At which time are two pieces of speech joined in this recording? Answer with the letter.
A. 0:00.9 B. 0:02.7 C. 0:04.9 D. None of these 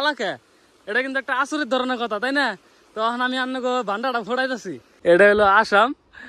C